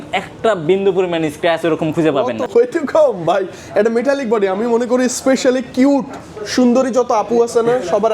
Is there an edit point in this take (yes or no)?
yes